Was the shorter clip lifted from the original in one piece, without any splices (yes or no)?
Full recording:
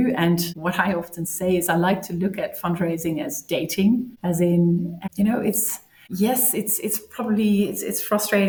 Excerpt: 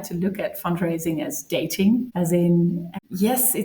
no